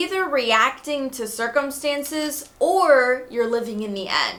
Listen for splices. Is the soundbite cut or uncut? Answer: uncut